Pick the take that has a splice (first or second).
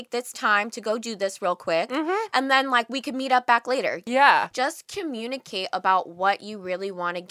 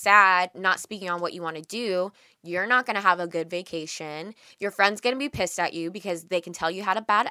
first